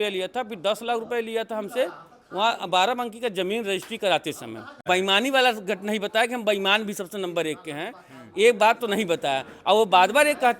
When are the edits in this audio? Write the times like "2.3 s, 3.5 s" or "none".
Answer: 4.8 s